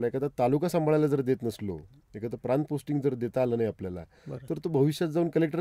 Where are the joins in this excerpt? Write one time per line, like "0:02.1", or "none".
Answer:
none